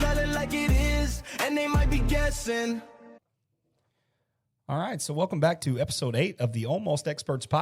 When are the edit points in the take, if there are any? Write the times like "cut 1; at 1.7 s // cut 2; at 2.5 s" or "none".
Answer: cut 1; at 3.2 s